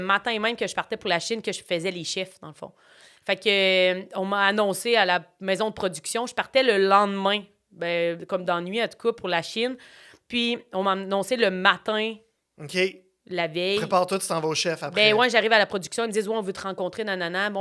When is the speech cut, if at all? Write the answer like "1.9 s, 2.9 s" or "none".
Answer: none